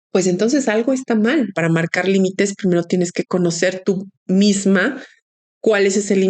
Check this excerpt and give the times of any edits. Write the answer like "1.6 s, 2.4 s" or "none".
1.5 s